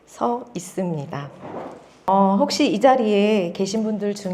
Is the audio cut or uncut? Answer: uncut